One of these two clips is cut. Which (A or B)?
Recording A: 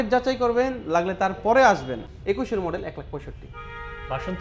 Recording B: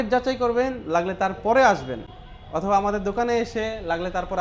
A